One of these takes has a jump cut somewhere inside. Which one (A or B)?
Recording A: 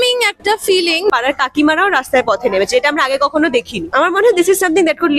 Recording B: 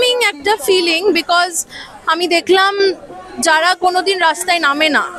A